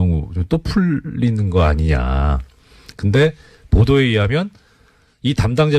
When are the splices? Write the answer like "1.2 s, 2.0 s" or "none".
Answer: 3.9 s